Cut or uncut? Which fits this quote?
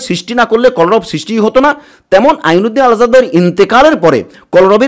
uncut